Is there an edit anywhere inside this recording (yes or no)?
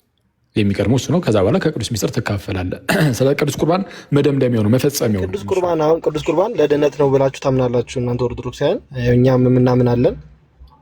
yes